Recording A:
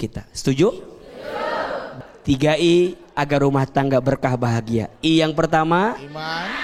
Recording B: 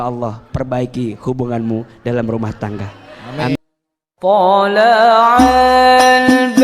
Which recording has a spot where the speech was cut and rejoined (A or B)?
B